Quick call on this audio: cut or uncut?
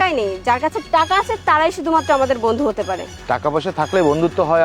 cut